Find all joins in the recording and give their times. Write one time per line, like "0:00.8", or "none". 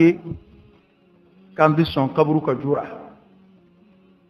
none